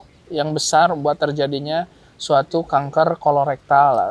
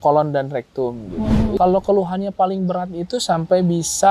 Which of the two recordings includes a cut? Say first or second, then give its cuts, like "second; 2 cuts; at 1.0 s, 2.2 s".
second; 1 cut; at 1.6 s